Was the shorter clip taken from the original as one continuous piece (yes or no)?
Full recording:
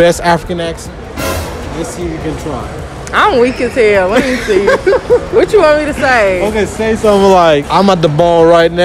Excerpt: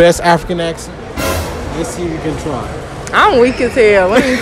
yes